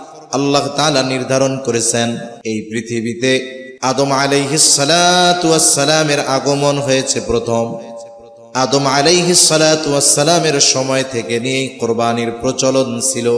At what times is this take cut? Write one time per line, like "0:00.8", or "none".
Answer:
0:02.3
0:03.6